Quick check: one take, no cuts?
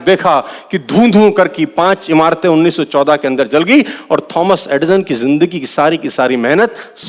yes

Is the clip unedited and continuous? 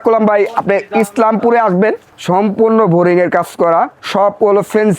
no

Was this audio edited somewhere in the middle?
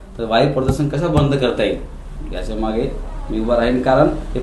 no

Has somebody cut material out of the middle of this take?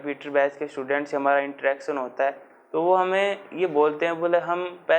no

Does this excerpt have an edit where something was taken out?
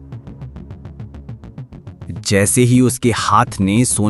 no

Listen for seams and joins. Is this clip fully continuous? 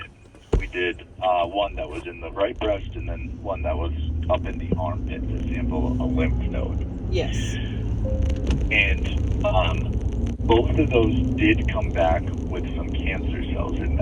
yes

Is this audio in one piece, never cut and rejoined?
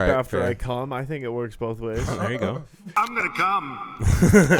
no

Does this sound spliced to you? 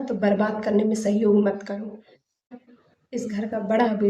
yes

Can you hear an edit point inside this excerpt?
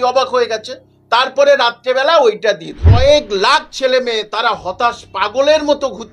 yes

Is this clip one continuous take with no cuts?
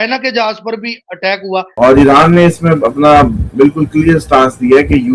no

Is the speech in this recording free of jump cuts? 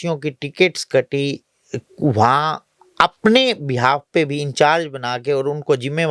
yes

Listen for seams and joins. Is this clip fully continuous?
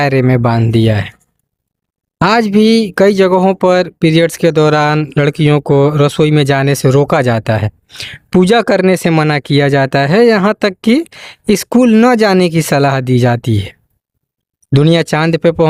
yes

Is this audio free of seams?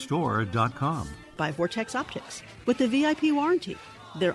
no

